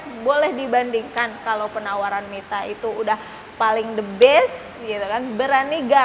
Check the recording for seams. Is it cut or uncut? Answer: uncut